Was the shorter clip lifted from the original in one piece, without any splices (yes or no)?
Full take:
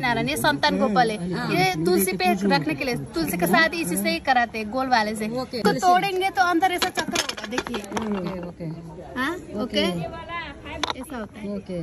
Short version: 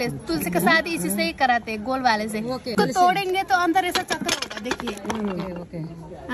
yes